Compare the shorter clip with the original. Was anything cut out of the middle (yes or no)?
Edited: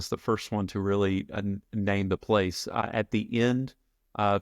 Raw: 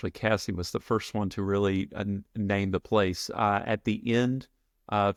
yes